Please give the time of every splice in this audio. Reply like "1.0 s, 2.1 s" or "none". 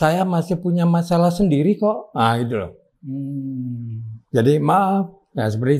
none